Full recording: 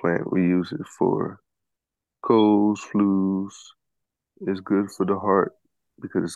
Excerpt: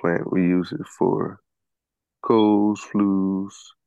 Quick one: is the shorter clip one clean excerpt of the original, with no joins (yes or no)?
yes